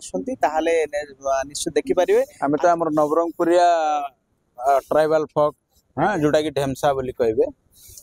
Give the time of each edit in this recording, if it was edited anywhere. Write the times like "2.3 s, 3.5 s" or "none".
2.3 s